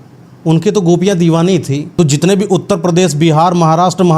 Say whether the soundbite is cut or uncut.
cut